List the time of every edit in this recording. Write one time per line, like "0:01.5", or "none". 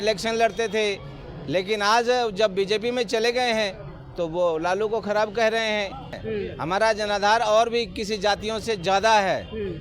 0:06.2